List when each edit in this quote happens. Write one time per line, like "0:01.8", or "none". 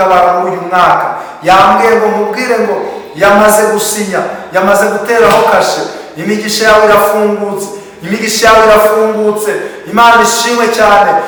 none